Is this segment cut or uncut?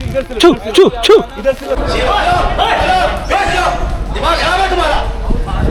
cut